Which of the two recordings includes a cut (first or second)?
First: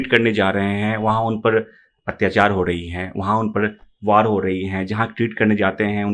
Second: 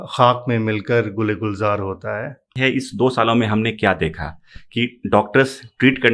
second